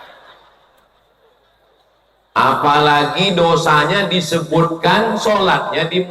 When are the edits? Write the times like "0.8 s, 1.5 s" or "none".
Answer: none